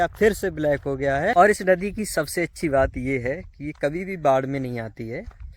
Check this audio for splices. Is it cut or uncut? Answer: cut